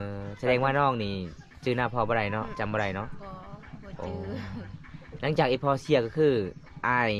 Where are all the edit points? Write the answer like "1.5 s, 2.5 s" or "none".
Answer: none